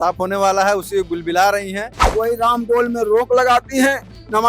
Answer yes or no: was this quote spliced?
yes